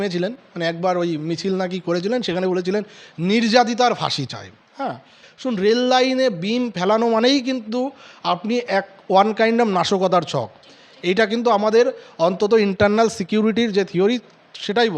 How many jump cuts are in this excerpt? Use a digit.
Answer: 1